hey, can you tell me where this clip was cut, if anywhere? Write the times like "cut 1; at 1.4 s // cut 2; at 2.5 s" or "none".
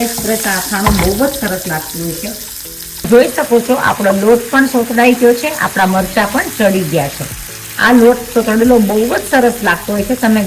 cut 1; at 3.1 s